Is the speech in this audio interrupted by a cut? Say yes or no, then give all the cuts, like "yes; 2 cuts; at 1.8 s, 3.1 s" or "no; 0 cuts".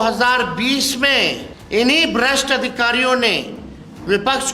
yes; 1 cut; at 1.5 s